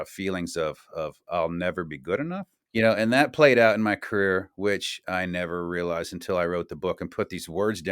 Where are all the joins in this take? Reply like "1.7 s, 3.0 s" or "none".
2.6 s